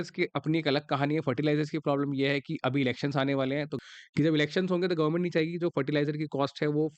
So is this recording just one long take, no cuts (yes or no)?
no